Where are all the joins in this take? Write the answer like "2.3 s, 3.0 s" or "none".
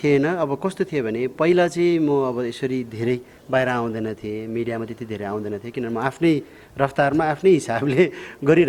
none